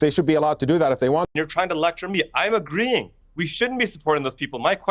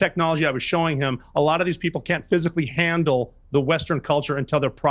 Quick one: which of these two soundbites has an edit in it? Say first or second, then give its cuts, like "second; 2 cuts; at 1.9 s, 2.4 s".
first; 1 cut; at 1.3 s